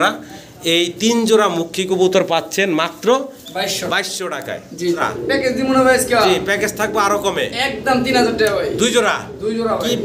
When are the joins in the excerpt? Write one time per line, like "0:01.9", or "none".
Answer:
0:05.0